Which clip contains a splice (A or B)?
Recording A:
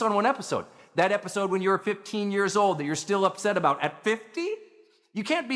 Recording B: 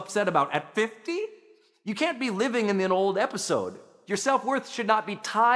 B